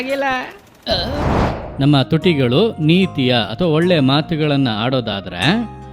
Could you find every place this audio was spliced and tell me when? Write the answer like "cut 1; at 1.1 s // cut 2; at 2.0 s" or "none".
cut 1; at 1.6 s